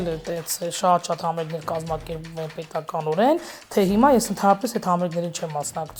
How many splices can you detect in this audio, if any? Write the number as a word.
zero